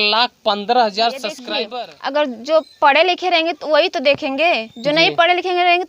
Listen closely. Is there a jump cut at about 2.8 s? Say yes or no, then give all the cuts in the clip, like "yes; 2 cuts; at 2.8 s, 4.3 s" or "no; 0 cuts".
no; 1 cut; at 1.5 s